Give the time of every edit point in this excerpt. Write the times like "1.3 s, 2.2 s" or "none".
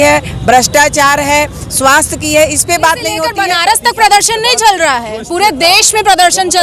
3.4 s